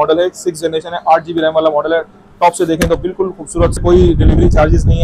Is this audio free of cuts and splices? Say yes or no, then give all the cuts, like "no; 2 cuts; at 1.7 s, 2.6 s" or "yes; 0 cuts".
no; 1 cut; at 3.8 s